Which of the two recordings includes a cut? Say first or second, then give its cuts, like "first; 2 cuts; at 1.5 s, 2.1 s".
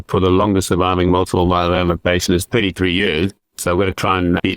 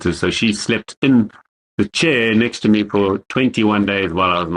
first; 1 cut; at 3.5 s